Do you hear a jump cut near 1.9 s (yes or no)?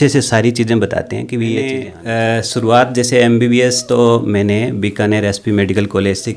yes